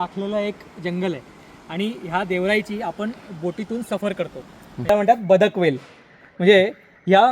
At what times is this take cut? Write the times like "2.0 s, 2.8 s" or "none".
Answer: 4.9 s